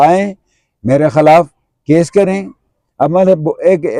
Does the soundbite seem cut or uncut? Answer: uncut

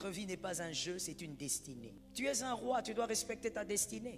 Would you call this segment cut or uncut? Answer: cut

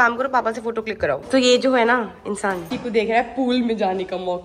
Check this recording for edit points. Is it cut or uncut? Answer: cut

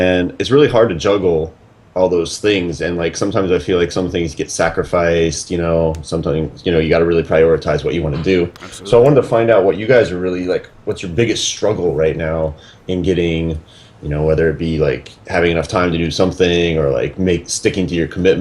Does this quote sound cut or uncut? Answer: uncut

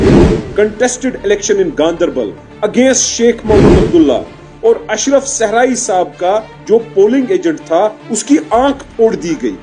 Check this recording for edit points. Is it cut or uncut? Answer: uncut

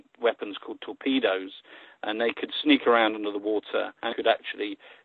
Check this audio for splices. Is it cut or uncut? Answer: cut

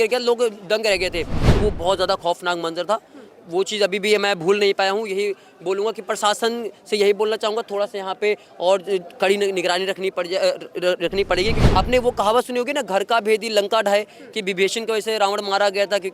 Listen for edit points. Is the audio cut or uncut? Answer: cut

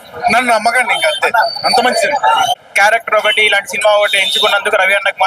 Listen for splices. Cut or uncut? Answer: cut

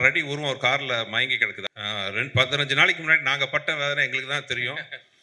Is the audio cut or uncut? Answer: cut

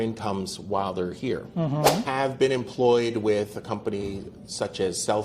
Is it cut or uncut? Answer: cut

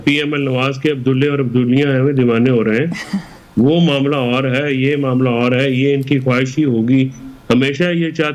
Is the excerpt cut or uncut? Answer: uncut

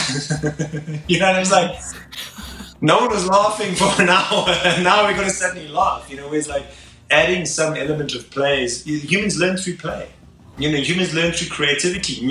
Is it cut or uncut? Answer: uncut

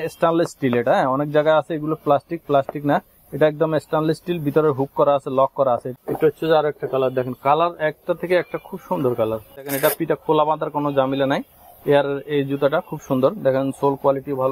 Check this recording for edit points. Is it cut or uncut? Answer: cut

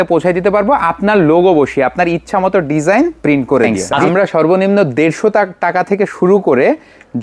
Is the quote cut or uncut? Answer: cut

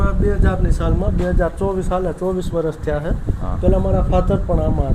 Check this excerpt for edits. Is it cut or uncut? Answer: uncut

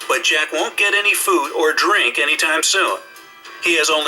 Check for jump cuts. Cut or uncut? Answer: cut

